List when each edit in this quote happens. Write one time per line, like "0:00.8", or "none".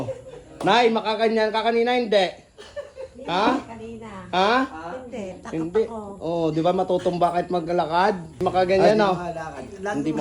0:08.4